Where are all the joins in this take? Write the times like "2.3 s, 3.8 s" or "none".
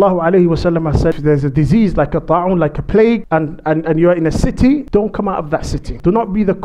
1.2 s, 3.2 s, 5.4 s